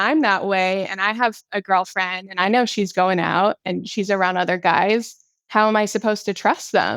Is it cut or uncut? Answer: uncut